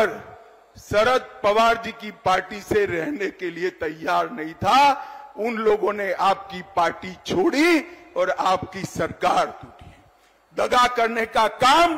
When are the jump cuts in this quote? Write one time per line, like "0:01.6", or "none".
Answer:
none